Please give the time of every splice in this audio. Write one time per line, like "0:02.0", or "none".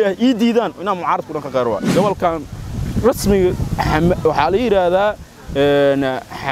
0:01.9